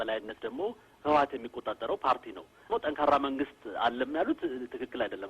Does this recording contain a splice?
yes; 1 cut; at 2.7 s

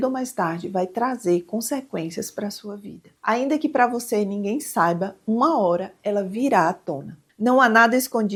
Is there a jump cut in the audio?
no; 0 cuts

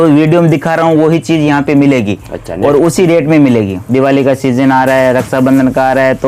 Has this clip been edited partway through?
yes; 1 cut; at 3.8 s

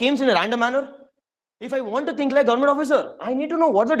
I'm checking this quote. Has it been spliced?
yes; 1 cut; at 1.7 s

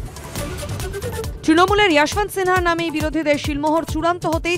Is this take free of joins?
no; 1 cut; at 1.0 s

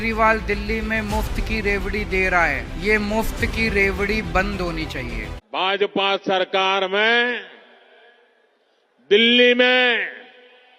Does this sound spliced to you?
yes; 1 cut; at 5.2 s

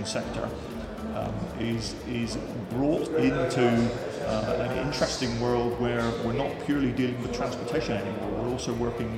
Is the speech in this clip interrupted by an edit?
no; 0 cuts

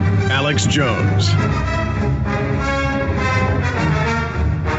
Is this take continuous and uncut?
no; 1 cut; at 3.8 s

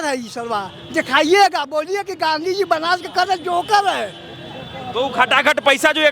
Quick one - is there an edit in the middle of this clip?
no; 0 cuts

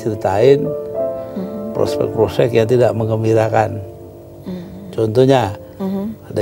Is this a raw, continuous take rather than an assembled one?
yes; 0 cuts

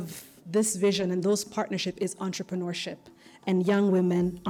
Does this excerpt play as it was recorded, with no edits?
yes; 0 cuts

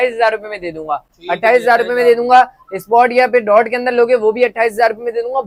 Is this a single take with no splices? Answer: yes; 0 cuts

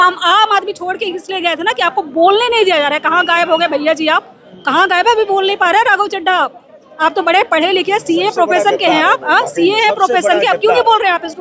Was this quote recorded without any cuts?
yes; 0 cuts

